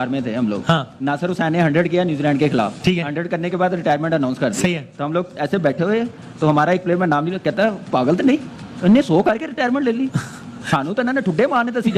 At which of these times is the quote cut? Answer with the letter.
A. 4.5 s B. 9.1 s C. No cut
C